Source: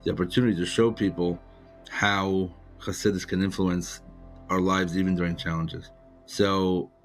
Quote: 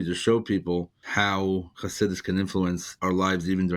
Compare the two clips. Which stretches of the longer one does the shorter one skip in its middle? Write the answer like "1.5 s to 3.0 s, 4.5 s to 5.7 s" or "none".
1.5 s to 1.8 s, 2.6 s to 2.8 s, 3.9 s to 4.4 s